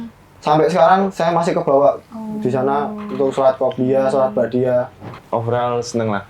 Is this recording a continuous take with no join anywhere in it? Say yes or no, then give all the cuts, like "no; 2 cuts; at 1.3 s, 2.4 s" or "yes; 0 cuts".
no; 1 cut; at 5.1 s